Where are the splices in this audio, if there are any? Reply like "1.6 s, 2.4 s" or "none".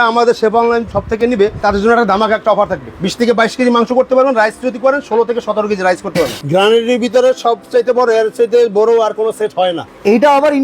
1.4 s, 2.9 s, 6.4 s, 9.8 s

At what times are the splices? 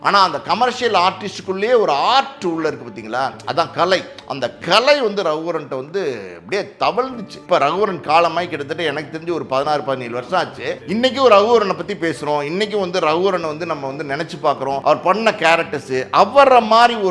7.3 s, 10.8 s, 14.8 s

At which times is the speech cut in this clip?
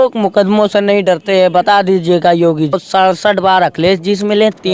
2.8 s

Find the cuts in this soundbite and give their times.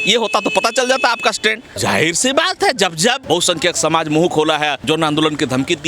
1.7 s, 3.2 s, 4.8 s

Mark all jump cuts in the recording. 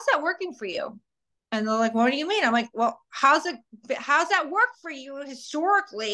none

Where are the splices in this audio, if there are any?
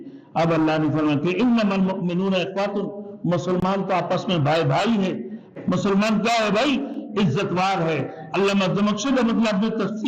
5.4 s

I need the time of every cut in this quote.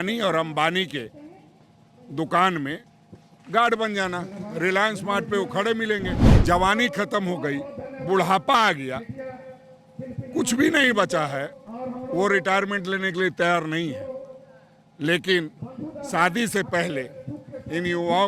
6.2 s

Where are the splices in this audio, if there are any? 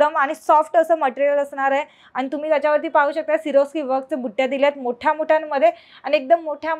none

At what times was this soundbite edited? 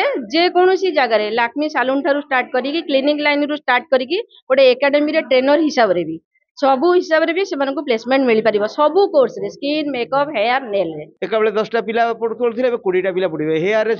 11.1 s

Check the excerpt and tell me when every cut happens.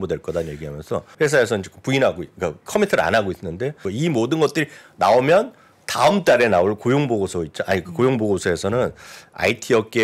1.1 s, 3.8 s

